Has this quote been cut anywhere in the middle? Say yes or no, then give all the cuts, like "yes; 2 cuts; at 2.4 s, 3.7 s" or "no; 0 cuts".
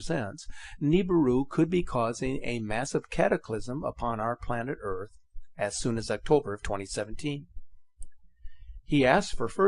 yes; 1 cut; at 1.9 s